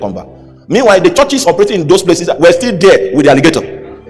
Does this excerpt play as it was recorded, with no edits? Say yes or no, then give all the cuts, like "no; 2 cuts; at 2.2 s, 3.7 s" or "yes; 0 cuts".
yes; 0 cuts